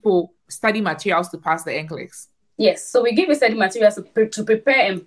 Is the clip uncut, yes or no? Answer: no